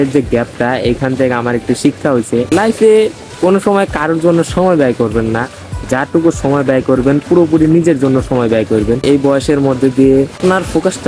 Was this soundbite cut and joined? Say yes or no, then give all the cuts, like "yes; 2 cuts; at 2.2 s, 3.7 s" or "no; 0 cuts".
no; 0 cuts